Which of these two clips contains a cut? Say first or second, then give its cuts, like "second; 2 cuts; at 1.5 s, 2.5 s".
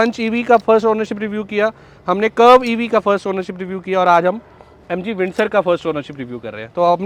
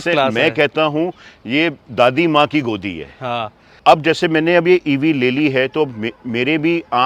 second; 1 cut; at 3.7 s